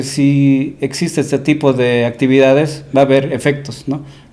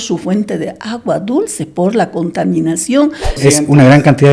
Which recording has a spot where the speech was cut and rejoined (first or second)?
second